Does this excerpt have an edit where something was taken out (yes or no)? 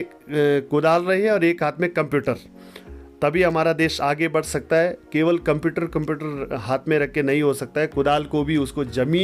no